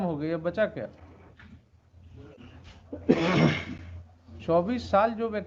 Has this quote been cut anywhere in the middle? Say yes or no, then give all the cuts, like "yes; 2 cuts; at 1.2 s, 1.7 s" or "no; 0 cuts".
no; 0 cuts